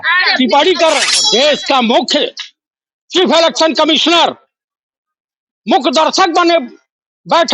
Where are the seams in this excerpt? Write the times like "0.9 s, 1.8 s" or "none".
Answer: 1.2 s